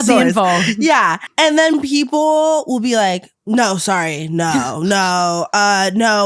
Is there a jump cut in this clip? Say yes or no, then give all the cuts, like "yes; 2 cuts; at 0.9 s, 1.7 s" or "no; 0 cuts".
yes; 2 cuts; at 1.2 s, 3.3 s